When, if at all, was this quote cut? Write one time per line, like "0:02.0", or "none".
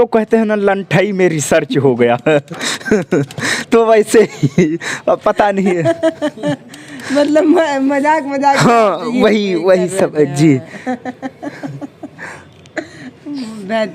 none